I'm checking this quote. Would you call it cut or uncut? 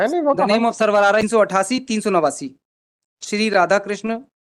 cut